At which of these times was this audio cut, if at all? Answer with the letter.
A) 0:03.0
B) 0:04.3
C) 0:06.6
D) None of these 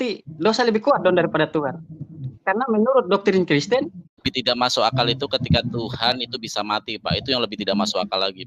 B